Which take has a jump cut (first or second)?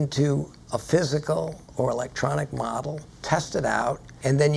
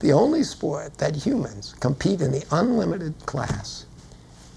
first